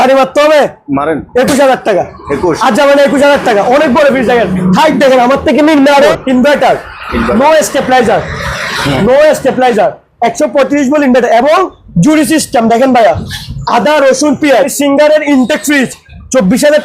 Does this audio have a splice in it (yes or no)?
yes